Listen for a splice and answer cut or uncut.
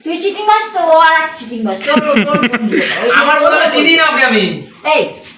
uncut